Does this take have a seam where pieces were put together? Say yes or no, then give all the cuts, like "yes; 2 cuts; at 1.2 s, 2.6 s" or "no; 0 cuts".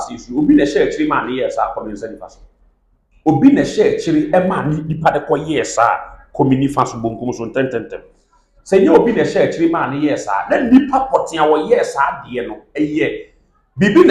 no; 0 cuts